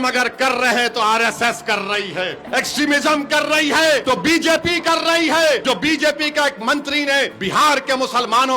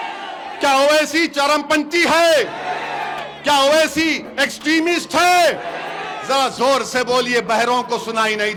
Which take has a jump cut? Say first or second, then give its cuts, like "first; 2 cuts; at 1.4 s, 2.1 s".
first; 4 cuts; at 2.4 s, 4.0 s, 5.6 s, 7.4 s